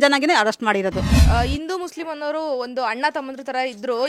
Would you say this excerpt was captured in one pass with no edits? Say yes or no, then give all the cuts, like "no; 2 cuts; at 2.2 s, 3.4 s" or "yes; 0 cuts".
no; 1 cut; at 1.2 s